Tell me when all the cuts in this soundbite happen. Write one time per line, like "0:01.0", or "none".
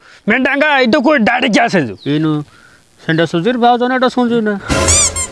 0:02.0